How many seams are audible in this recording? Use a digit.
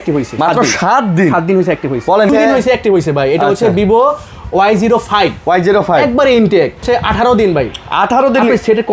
2